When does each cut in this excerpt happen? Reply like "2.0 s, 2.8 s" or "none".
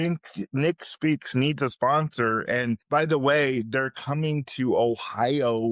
2.8 s

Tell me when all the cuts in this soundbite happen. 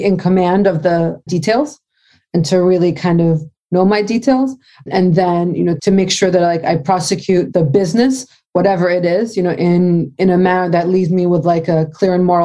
1.3 s, 4.8 s, 5.8 s, 7.5 s

